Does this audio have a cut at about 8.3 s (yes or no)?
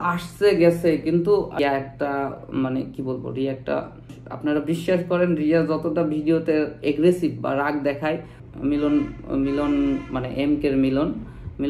yes